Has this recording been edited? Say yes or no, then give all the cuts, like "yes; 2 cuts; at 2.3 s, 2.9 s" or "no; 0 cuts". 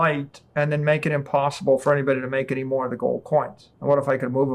yes; 1 cut; at 3.6 s